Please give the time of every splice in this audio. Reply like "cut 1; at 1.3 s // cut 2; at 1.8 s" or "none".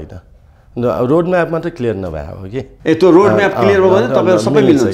cut 1; at 2.7 s

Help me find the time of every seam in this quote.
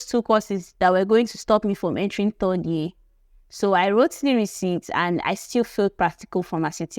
none

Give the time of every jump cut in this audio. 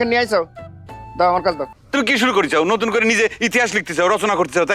cut 1; at 1.7 s

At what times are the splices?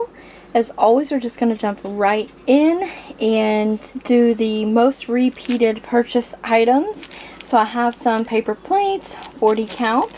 cut 1; at 3.9 s

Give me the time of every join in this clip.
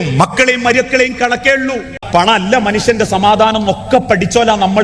cut 1; at 2.0 s

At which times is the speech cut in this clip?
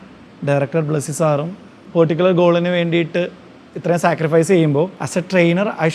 cut 1; at 1.8 s // cut 2; at 5.0 s

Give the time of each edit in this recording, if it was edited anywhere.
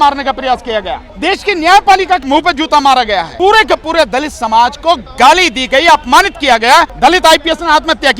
cut 1; at 1.0 s // cut 2; at 2.2 s // cut 3; at 3.3 s // cut 4; at 6.9 s

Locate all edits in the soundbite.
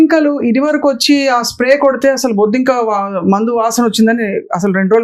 none

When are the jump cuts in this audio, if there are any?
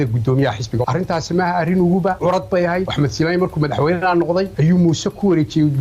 cut 1; at 0.8 s // cut 2; at 2.9 s // cut 3; at 4.5 s

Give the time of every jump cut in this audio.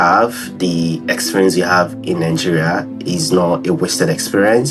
none

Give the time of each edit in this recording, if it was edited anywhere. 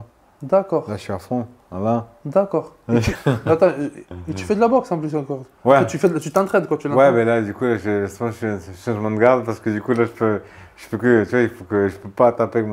none

